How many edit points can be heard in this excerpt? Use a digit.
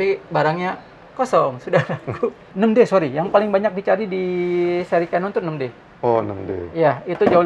1